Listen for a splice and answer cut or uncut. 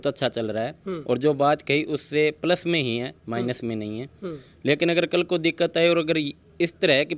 uncut